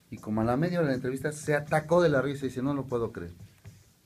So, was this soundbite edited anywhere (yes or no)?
yes